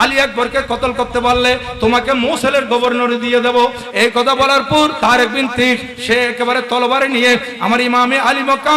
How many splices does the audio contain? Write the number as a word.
one